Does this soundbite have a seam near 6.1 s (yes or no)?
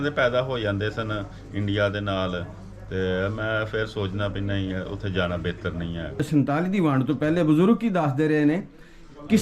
yes